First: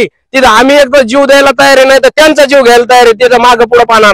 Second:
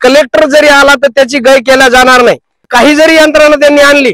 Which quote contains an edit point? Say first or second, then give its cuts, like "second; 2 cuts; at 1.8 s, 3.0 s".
second; 1 cut; at 2.7 s